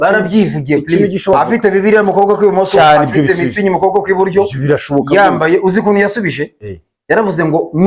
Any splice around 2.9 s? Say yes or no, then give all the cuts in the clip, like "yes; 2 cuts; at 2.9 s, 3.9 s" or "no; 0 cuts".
no; 1 cut; at 1.3 s